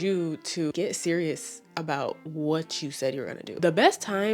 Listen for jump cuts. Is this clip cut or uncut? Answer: cut